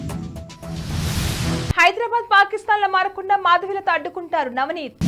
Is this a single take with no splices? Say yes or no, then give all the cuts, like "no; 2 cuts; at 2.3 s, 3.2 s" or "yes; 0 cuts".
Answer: no; 1 cut; at 1.7 s